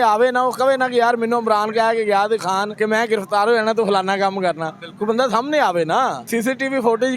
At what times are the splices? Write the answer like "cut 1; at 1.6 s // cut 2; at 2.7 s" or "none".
cut 1; at 2.7 s // cut 2; at 6.2 s